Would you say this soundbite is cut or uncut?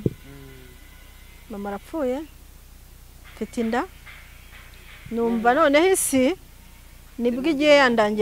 uncut